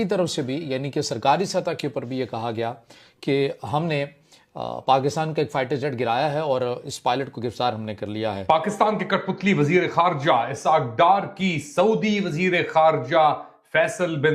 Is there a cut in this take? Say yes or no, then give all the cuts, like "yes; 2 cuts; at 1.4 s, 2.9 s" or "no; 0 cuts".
no; 0 cuts